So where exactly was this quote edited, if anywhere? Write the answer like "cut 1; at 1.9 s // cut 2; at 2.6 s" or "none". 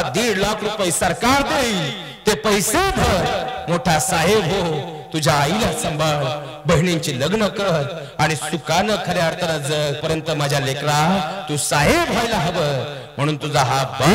cut 1; at 10.0 s

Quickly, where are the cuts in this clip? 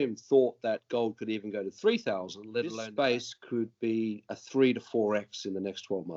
cut 1; at 2.8 s

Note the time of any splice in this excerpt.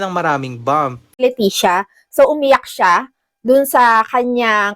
cut 1; at 1.2 s

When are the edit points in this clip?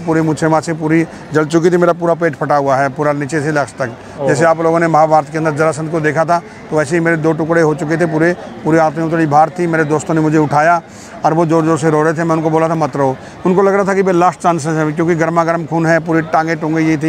none

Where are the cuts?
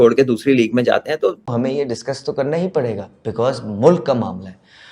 cut 1; at 1.4 s

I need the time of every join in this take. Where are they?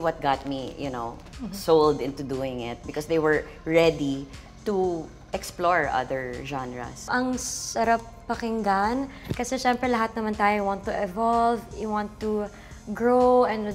cut 1; at 7.0 s

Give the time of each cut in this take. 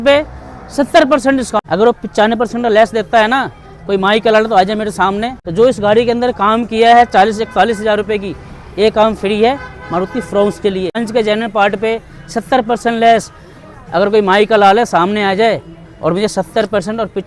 cut 1; at 1.6 s // cut 2; at 5.4 s // cut 3; at 11.0 s

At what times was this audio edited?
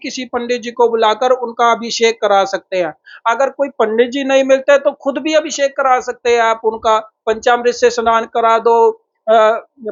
none

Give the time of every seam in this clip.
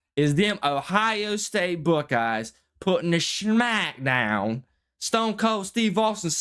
none

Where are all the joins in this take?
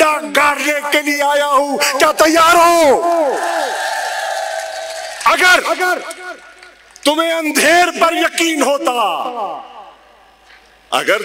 cut 1; at 5.1 s

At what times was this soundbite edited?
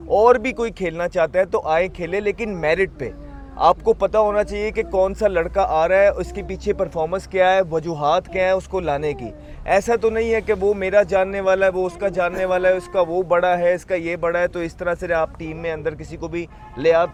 none

